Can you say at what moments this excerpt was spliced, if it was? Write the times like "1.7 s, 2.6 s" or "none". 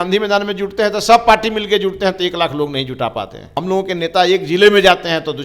3.6 s